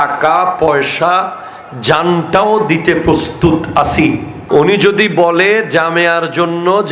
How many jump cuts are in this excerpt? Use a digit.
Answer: 1